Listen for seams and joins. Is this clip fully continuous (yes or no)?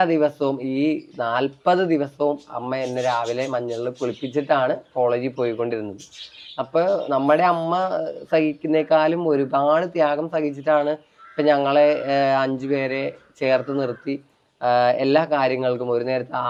yes